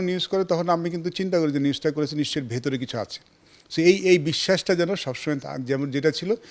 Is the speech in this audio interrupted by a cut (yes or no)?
no